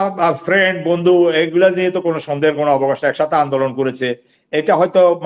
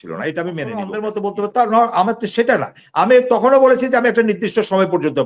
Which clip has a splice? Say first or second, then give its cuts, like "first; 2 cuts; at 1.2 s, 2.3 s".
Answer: second; 1 cut; at 1.0 s